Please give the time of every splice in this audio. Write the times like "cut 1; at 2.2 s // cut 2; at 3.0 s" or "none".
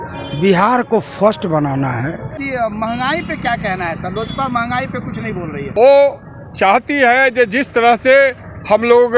cut 1; at 2.4 s // cut 2; at 5.6 s